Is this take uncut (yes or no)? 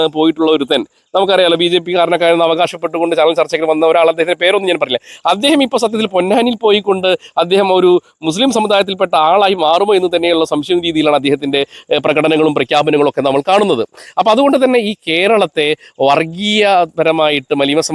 yes